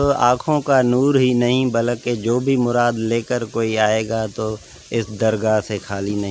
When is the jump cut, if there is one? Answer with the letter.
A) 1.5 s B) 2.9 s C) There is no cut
C